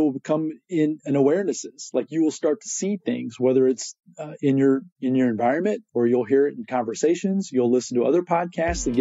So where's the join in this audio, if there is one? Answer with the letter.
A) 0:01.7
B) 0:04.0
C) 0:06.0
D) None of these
D